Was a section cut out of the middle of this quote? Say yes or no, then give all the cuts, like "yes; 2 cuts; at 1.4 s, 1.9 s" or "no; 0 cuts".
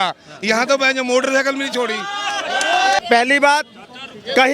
yes; 1 cut; at 3.0 s